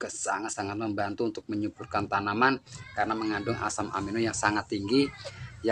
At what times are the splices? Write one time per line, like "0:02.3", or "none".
0:02.8

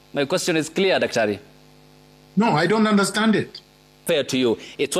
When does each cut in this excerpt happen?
0:04.0

